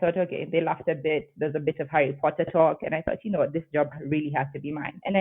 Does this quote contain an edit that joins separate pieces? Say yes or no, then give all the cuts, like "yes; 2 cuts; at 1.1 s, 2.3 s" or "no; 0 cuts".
no; 0 cuts